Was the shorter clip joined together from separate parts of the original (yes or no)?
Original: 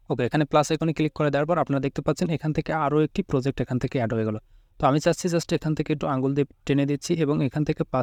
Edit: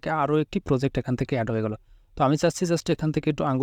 no